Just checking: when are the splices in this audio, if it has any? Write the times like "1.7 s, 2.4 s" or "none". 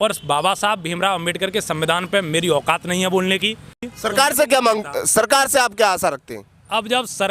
3.8 s